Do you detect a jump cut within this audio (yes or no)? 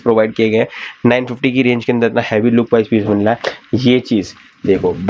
no